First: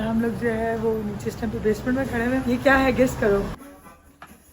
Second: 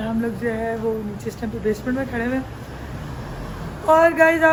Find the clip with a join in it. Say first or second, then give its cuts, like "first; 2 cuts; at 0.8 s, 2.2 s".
first; 1 cut; at 2.4 s